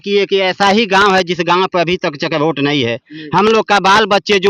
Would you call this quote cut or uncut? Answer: uncut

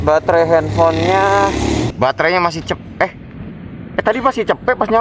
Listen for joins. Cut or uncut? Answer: cut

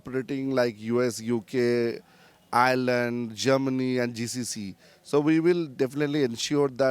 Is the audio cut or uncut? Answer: uncut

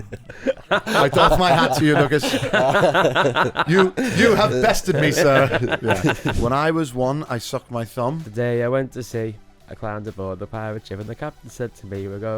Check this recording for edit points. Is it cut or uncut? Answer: cut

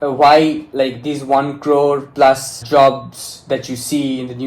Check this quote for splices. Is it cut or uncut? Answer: cut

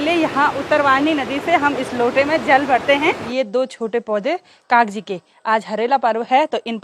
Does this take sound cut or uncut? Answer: cut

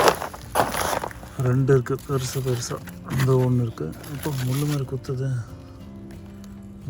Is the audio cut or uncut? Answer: uncut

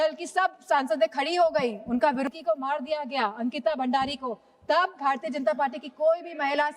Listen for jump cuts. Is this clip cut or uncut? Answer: cut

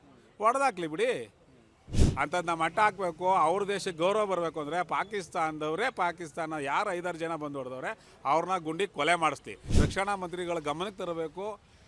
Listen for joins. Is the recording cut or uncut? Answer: cut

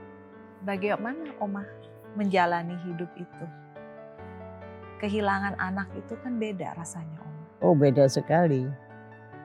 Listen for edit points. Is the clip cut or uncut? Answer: cut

